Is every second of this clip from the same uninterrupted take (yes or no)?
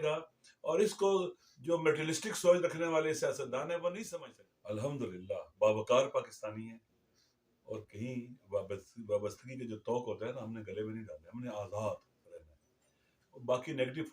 no